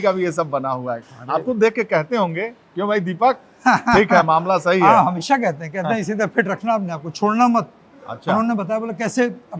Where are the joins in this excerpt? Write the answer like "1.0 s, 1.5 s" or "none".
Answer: none